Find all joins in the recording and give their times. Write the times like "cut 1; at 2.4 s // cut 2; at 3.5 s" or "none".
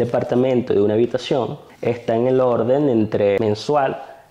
cut 1; at 1.7 s // cut 2; at 3.4 s